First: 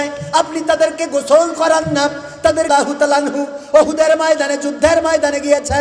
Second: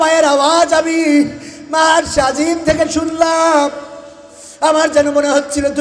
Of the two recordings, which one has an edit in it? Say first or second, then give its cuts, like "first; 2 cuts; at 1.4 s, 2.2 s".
first; 1 cut; at 2.7 s